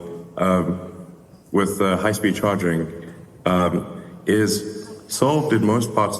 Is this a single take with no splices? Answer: yes; 0 cuts

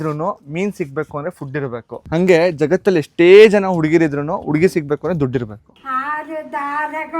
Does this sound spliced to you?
yes; 1 cut; at 5.6 s

